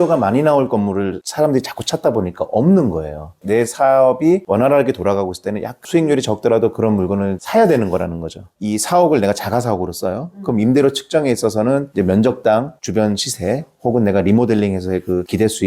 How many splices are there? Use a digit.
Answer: 1